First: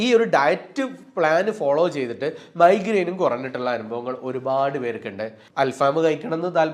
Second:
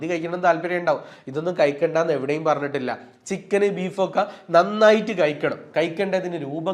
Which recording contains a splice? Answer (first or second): first